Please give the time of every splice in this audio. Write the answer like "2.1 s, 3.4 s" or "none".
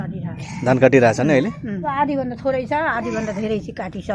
1.8 s